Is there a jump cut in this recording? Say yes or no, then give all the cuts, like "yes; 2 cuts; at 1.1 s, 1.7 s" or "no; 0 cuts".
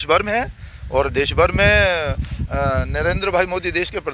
no; 0 cuts